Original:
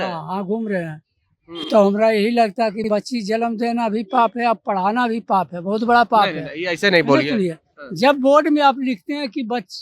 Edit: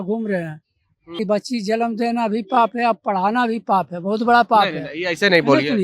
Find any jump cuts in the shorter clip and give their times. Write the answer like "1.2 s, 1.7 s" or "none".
1.2 s

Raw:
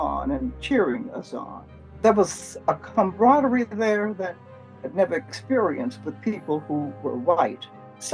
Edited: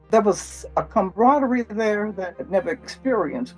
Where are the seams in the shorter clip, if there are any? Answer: 0.9 s, 2.4 s

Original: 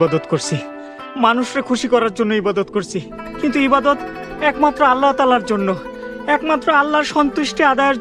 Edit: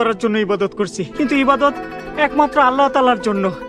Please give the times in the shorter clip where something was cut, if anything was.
1.0 s

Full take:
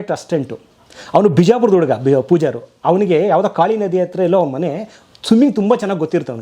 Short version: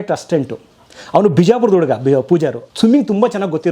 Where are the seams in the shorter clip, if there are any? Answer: 2.6 s

